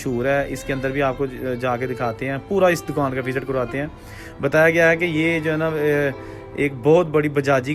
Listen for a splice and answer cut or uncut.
uncut